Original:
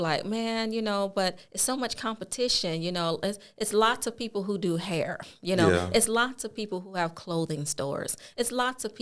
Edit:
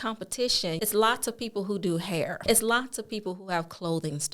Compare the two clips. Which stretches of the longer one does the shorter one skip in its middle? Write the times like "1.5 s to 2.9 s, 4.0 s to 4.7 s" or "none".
2.8 s to 3.6 s, 5.2 s to 5.9 s